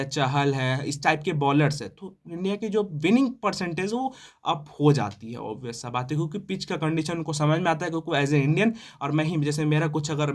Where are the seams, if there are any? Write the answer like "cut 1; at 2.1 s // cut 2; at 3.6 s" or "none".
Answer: none